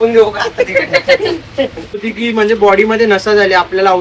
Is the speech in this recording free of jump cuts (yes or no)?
no